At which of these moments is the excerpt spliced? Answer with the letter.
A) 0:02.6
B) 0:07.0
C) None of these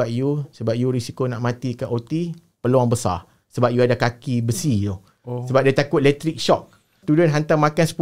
B